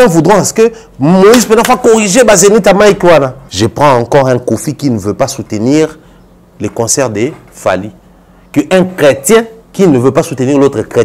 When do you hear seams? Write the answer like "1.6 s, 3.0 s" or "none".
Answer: 3.4 s